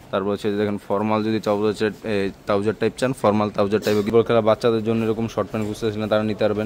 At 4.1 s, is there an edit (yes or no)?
yes